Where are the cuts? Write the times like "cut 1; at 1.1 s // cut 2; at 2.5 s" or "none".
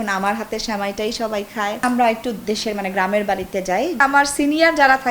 cut 1; at 1.8 s // cut 2; at 4.0 s